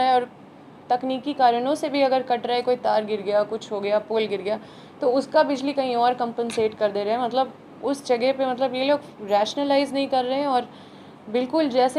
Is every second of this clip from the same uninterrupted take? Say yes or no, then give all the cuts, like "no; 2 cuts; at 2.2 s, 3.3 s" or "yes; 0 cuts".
yes; 0 cuts